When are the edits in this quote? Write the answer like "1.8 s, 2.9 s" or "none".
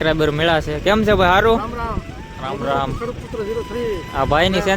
none